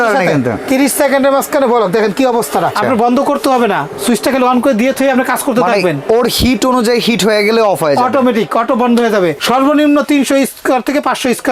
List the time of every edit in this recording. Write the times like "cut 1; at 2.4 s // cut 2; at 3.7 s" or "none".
cut 1; at 2.8 s // cut 2; at 9.4 s